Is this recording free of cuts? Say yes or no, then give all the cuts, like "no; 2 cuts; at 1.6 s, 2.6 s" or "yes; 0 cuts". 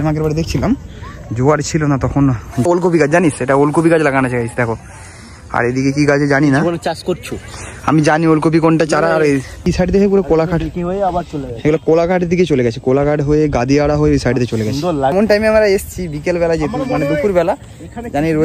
no; 3 cuts; at 2.6 s, 9.7 s, 15.1 s